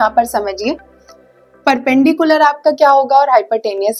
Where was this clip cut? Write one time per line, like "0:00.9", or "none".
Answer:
none